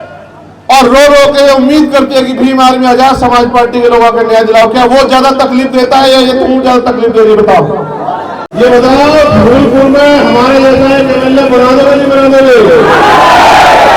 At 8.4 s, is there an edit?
yes; 1 cut; at 8.4 s

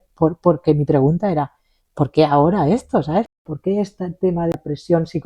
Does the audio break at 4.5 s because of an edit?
yes; 2 cuts; at 3.3 s, 4.5 s

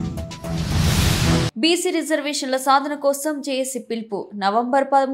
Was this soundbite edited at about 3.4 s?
no; 1 cut; at 1.5 s

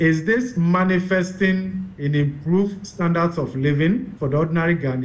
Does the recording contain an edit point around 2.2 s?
no; 1 cut; at 4.1 s

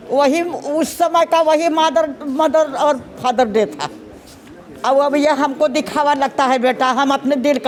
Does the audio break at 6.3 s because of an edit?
no; 0 cuts

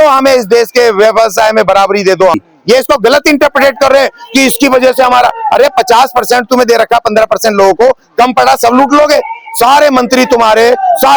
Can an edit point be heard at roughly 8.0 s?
no; 1 cut; at 2.4 s

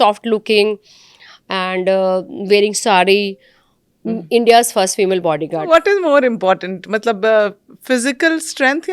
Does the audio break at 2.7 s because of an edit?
no; 1 cut; at 5.7 s

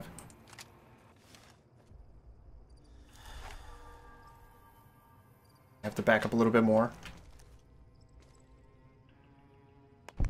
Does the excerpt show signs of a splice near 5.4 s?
no; 1 cut; at 1.6 s

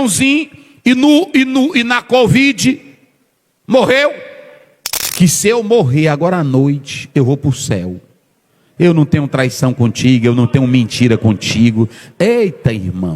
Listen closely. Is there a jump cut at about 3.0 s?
no; 1 cut; at 5.0 s

